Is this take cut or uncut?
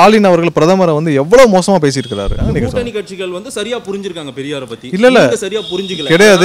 cut